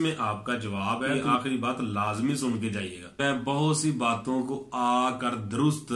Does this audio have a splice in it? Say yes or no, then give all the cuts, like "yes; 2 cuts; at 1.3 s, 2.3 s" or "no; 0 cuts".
yes; 2 cuts; at 1.1 s, 3.2 s